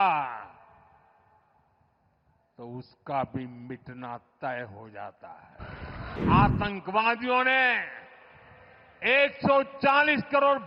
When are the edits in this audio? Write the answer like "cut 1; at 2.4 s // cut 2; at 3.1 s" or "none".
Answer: cut 1; at 6.2 s